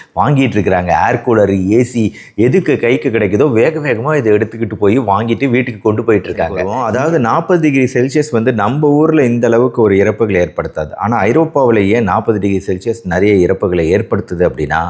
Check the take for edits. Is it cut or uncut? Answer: cut